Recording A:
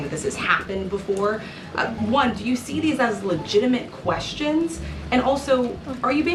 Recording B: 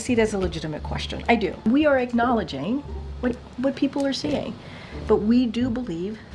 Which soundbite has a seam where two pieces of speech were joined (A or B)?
B